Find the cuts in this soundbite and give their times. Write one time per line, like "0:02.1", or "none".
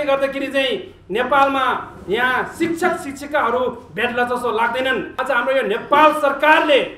0:05.1